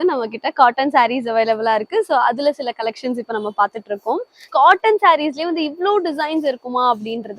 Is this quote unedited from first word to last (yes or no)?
no